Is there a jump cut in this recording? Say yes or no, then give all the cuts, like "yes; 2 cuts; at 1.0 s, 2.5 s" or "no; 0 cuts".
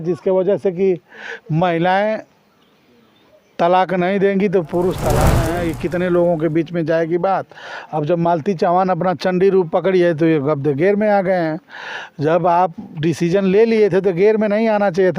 yes; 1 cut; at 5.4 s